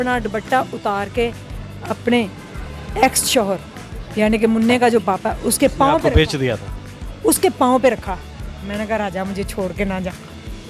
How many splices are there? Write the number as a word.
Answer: zero